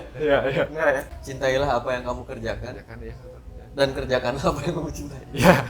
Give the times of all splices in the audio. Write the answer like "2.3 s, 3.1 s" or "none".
1.2 s